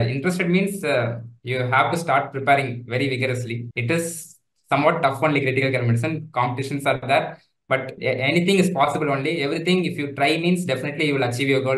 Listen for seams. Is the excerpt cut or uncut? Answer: cut